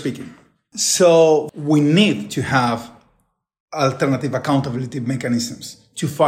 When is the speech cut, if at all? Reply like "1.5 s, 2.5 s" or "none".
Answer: 1.5 s